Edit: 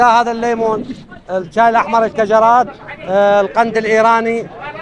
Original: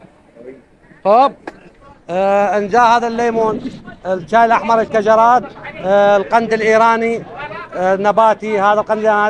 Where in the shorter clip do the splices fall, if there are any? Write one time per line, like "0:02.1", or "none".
none